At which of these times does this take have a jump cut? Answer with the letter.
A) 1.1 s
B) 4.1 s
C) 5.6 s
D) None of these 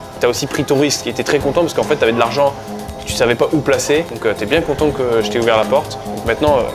B